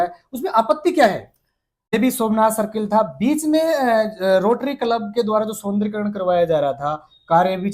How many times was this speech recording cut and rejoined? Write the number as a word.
one